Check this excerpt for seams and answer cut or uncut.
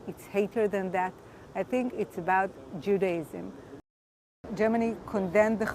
cut